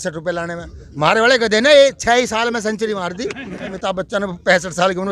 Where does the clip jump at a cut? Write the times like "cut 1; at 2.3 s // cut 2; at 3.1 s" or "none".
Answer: cut 1; at 3.8 s